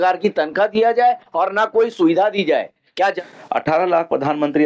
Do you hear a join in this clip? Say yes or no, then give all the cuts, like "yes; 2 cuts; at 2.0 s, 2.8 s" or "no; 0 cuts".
yes; 1 cut; at 2.9 s